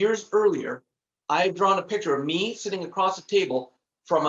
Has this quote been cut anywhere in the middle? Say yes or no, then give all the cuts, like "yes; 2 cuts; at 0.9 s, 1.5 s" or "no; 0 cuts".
no; 0 cuts